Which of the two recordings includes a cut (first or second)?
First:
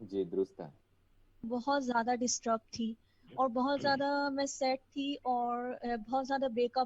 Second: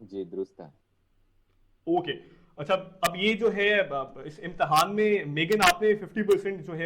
first